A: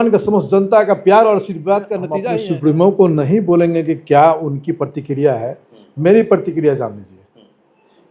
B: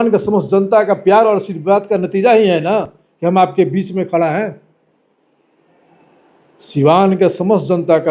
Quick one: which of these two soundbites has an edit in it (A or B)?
A